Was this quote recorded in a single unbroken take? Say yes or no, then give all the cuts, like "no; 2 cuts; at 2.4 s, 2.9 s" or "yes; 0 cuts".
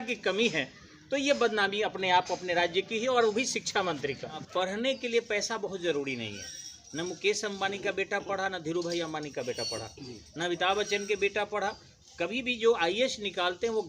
no; 1 cut; at 4.4 s